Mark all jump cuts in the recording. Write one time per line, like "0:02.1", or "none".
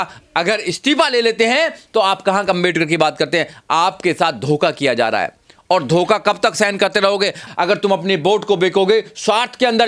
0:07.5

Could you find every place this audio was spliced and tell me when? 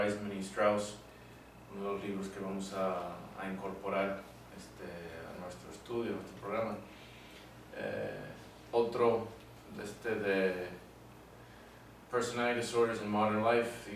0:05.0

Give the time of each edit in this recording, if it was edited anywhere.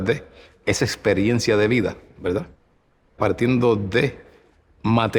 0:03.1

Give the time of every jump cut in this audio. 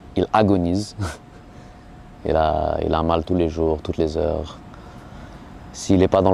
none

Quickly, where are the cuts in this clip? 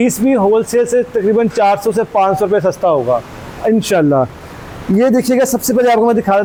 none

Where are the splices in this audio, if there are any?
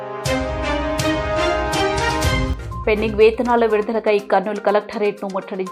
0:02.5

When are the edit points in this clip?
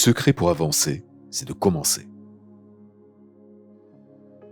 0:01.9

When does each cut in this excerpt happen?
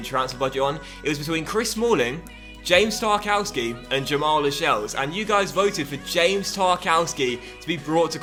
none

